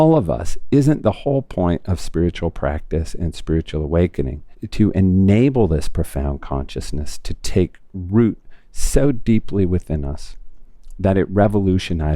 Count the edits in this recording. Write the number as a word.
one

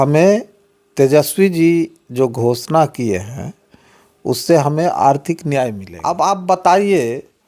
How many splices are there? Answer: one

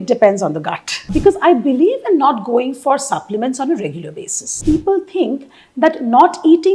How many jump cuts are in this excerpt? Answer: two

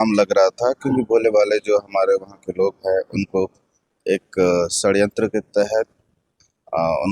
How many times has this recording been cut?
zero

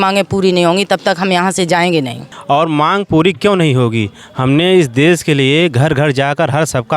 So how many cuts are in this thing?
one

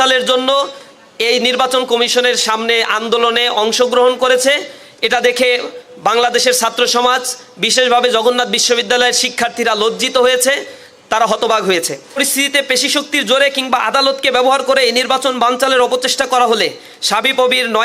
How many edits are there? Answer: one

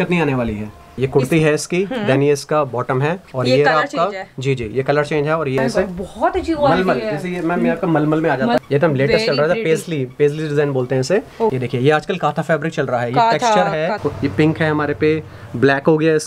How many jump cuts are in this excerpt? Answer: five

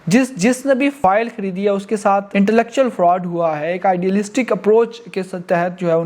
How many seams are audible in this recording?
two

